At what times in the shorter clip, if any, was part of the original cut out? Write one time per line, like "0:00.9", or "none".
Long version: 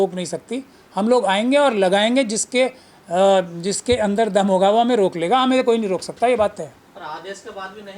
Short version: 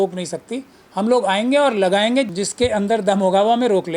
0:02.4

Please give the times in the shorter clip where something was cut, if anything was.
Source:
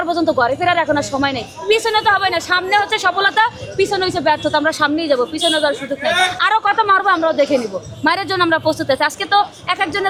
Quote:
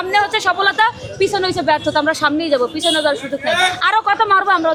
none

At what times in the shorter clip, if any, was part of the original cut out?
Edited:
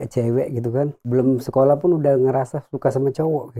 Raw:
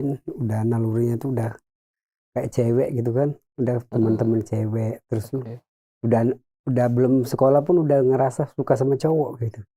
0:01.1

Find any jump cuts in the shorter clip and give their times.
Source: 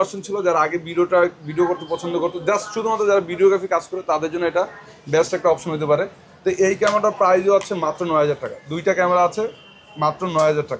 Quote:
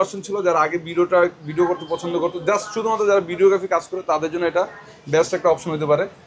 none

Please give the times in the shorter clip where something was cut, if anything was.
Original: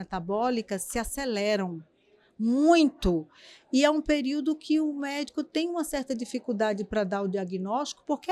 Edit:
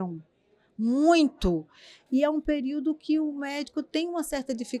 none

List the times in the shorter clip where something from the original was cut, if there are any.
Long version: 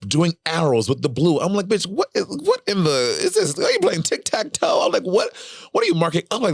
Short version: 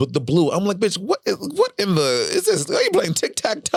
none

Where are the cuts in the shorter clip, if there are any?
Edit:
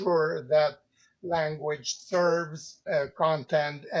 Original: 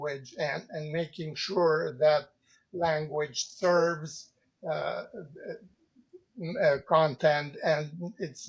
0:02.7

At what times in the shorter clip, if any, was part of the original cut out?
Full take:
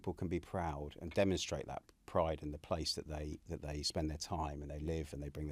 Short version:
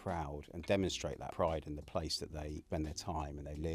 0:01.2
0:02.6

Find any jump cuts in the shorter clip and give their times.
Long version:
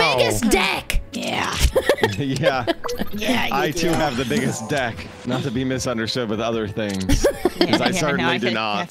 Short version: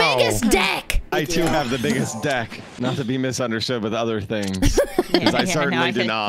0:01.1

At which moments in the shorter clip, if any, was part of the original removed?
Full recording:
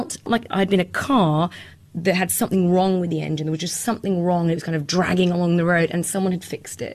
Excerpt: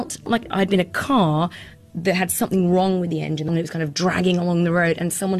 0:03.5

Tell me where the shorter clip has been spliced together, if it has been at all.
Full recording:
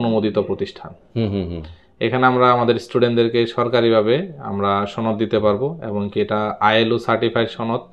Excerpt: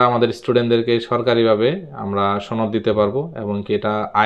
none

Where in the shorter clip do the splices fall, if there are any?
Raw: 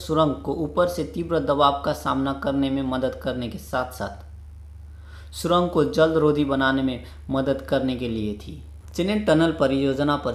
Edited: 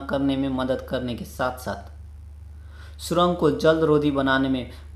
none

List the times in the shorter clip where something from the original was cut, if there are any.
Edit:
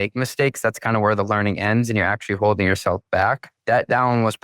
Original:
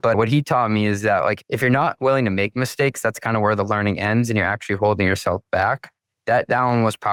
0:03.5

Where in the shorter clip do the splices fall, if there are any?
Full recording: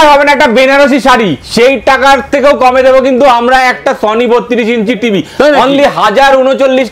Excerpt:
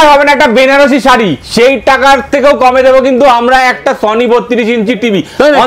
none

